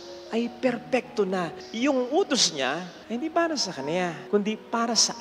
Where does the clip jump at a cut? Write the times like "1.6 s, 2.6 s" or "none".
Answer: 1.6 s, 2.9 s, 4.2 s